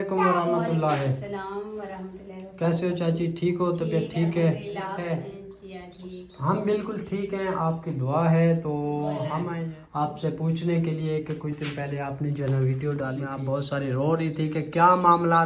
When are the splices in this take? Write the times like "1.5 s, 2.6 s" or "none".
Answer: 5.0 s, 9.5 s, 13.3 s